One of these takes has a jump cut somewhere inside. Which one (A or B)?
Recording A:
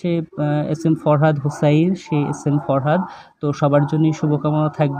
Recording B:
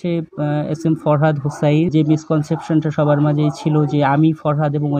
B